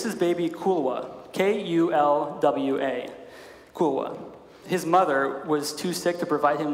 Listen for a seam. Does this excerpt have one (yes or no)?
yes